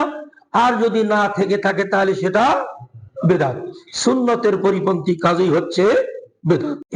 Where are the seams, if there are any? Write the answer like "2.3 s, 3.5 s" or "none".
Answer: none